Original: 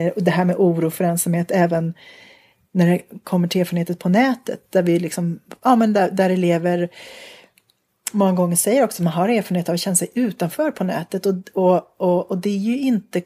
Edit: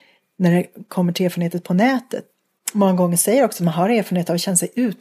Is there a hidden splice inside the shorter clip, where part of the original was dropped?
yes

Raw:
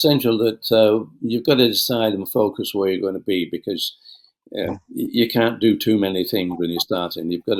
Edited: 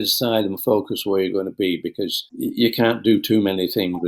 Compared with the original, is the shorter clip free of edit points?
no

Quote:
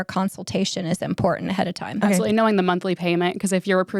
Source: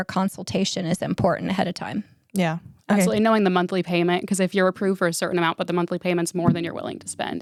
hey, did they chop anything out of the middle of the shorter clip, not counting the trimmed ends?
yes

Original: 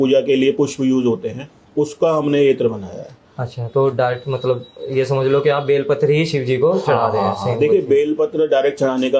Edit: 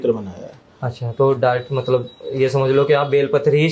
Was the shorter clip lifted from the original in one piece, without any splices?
yes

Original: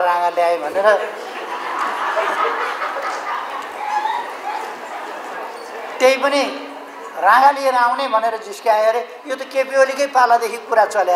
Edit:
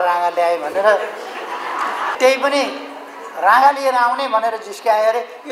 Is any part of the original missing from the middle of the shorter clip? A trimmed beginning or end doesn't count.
yes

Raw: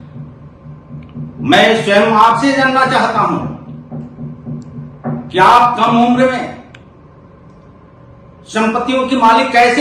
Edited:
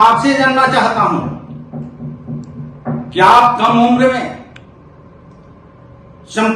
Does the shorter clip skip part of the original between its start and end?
no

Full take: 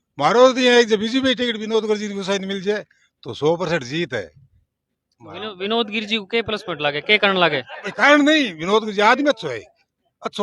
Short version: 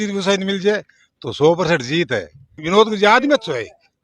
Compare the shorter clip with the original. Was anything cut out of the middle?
yes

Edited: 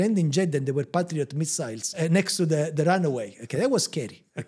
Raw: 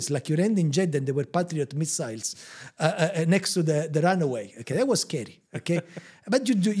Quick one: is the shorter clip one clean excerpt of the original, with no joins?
no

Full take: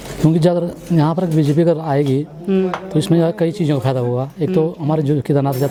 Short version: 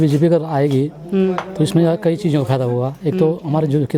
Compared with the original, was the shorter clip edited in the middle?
no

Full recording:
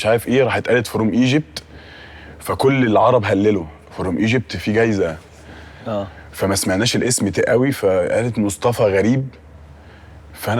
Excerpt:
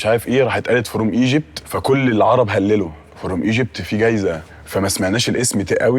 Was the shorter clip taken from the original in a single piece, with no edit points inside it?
no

